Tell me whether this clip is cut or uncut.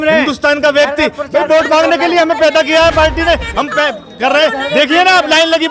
uncut